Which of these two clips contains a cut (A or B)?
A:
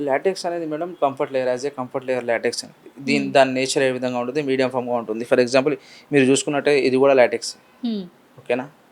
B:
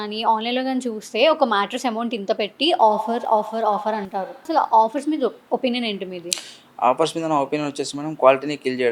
B